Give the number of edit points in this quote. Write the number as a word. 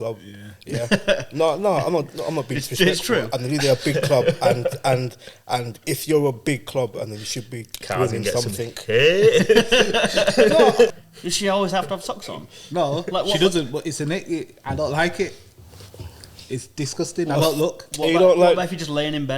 one